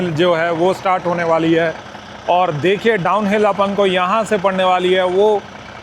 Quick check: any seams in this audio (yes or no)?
no